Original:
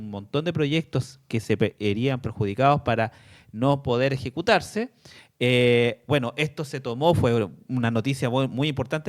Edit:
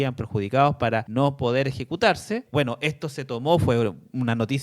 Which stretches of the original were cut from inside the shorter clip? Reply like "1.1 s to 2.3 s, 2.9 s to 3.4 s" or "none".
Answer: 3.1 s to 3.5 s, 4.9 s to 6.0 s